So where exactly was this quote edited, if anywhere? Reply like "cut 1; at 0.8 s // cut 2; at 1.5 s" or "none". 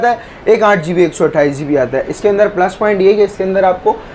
none